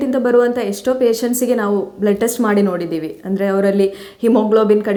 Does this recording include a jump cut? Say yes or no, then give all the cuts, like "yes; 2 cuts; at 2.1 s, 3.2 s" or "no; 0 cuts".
no; 0 cuts